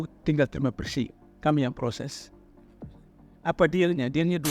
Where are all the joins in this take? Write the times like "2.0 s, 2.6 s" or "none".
2.1 s, 3.4 s